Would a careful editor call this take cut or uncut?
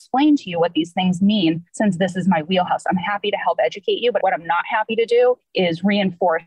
cut